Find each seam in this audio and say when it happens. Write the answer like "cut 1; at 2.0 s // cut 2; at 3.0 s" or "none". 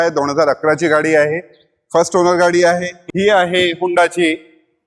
cut 1; at 3.0 s